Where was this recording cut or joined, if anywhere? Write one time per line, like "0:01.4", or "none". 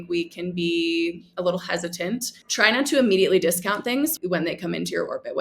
0:02.4
0:04.2